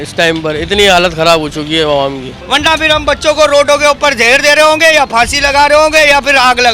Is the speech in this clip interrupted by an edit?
yes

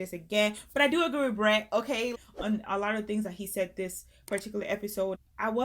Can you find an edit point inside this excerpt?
no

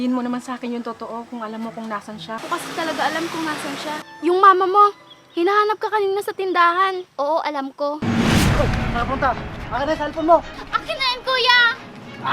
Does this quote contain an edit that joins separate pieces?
yes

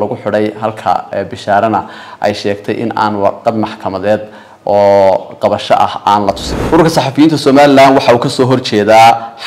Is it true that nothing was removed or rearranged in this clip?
no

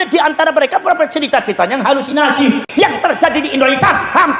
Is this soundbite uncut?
no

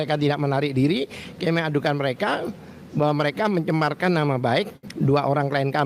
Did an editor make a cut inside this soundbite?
yes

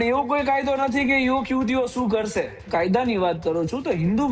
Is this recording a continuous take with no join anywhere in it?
no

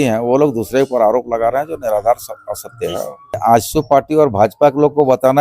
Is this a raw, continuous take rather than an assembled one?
no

